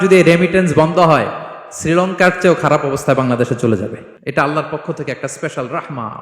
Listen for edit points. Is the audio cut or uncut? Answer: cut